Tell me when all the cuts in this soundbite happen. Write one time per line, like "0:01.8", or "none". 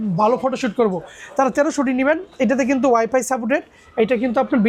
none